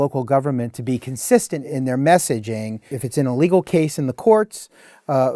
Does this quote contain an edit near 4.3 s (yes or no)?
no